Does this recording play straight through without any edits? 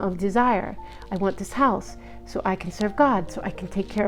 yes; 0 cuts

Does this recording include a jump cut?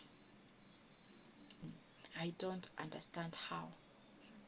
yes; 1 cut; at 1.7 s

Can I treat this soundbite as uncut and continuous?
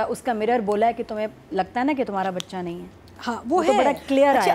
yes; 0 cuts

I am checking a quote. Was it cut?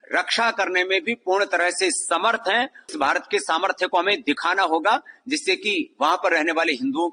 yes; 1 cut; at 2.9 s

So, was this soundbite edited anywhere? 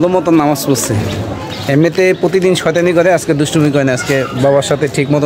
no; 0 cuts

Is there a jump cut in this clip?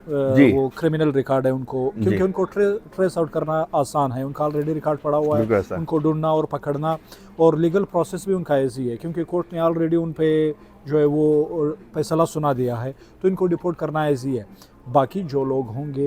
no; 0 cuts

